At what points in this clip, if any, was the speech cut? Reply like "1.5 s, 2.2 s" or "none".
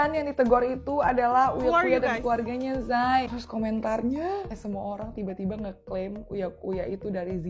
3.3 s